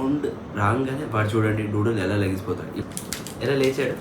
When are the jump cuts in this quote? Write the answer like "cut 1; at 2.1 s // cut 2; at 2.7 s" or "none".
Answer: cut 1; at 2.8 s